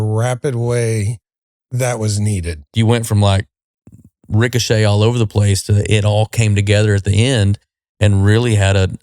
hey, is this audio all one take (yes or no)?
no